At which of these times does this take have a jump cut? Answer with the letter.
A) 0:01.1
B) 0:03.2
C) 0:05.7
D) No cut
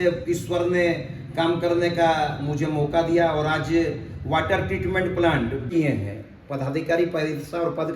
C